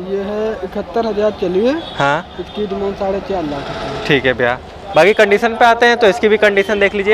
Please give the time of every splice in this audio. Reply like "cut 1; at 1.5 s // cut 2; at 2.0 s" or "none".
none